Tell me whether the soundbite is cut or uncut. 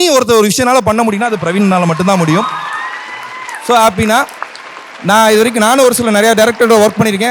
uncut